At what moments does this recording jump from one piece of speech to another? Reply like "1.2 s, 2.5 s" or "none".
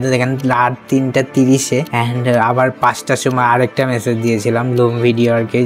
1.9 s